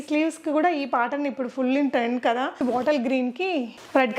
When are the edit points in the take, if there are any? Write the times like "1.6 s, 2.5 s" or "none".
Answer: 2.6 s